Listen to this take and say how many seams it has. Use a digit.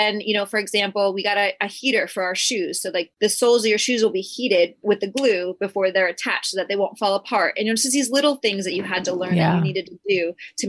1